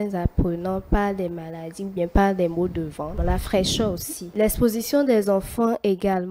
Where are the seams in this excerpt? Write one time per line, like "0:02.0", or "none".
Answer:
0:03.1
0:04.3